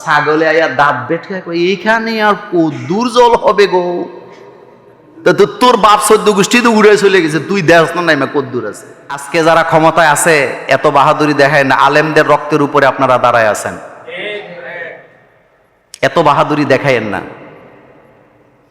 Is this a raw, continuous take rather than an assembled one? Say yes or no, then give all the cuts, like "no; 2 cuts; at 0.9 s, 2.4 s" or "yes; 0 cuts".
no; 1 cut; at 9.2 s